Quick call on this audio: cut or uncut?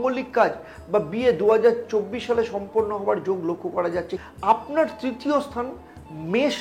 cut